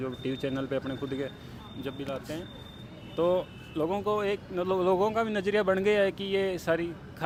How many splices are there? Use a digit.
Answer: 0